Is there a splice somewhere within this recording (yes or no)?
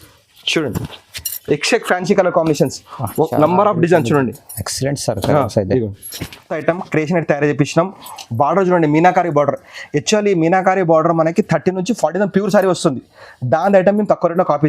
yes